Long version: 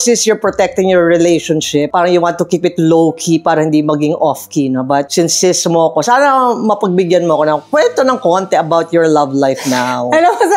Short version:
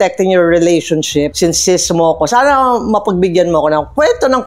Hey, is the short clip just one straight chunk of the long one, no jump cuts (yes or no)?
no